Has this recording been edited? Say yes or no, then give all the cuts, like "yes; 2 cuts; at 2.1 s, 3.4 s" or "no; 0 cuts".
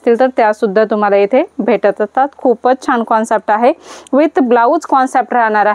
no; 0 cuts